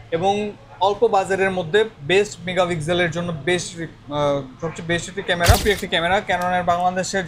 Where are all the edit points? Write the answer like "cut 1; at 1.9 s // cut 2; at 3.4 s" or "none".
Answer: cut 1; at 5.6 s